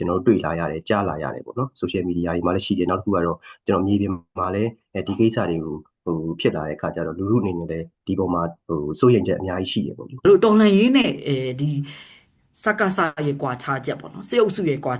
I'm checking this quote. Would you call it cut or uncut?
cut